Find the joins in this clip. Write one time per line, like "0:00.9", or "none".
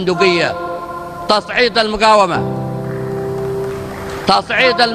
none